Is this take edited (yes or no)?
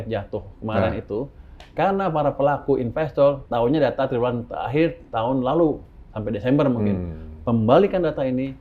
yes